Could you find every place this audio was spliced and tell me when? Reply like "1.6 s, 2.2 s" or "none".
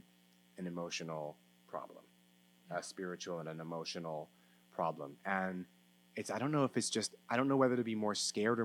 none

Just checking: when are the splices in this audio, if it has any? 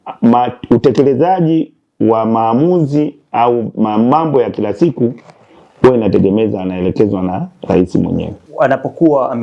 8.4 s

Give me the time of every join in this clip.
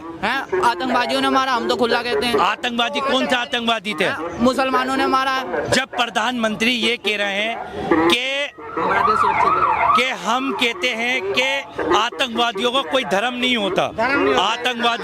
none

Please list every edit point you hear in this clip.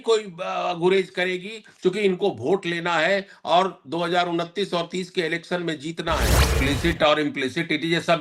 6.4 s

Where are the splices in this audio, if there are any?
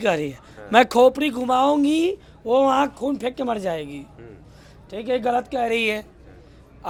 none

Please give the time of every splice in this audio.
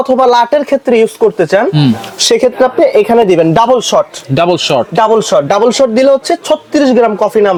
none

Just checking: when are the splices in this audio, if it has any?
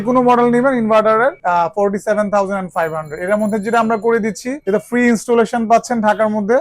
1.4 s, 4.5 s

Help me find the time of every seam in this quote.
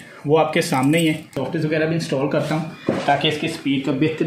1.4 s

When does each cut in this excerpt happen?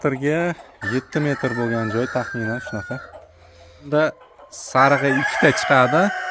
3.9 s

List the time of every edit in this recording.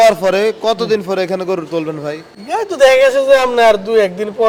none

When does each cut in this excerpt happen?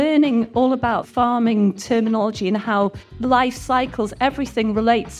1.1 s, 3.1 s

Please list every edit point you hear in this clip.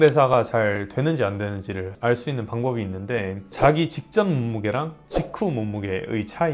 1.9 s

